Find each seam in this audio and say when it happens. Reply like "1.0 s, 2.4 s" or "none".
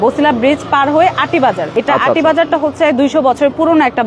1.6 s